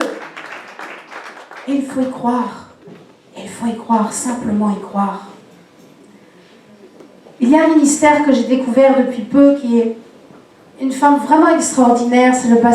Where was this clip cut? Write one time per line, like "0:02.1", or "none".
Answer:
none